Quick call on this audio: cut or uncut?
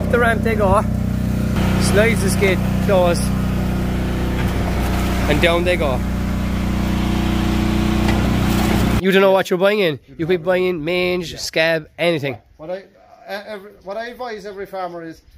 cut